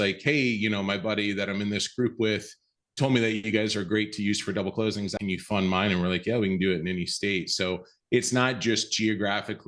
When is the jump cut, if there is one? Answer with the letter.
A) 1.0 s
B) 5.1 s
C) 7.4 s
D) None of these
B